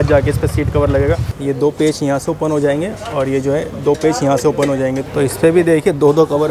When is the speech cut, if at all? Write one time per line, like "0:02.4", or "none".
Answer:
0:01.3
0:05.0